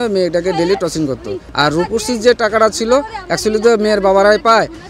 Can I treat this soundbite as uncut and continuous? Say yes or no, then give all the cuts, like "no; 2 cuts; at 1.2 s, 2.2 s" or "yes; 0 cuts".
yes; 0 cuts